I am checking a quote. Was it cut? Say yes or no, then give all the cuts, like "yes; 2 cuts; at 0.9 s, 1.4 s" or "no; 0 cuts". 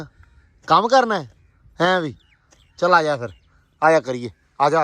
no; 0 cuts